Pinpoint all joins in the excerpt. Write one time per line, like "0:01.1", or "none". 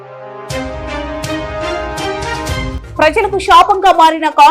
0:02.8

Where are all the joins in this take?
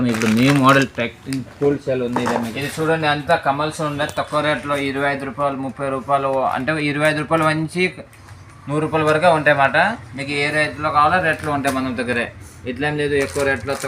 0:02.5

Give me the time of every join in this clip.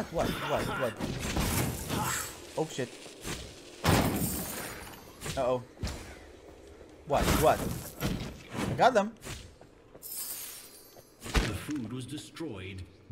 none

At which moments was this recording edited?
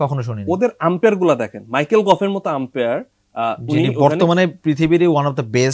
none

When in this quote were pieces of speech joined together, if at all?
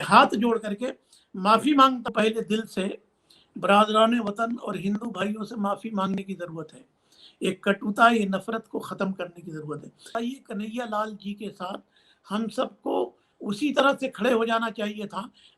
0:02.1
0:10.1

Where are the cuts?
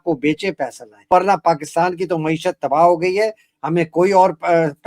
0:01.1

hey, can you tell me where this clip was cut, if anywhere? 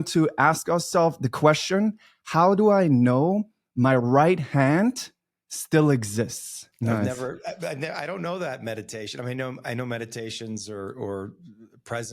0:07.0

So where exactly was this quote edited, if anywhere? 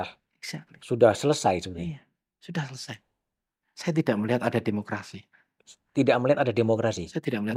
none

